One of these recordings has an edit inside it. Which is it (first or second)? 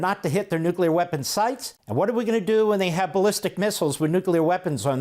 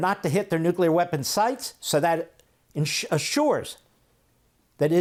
first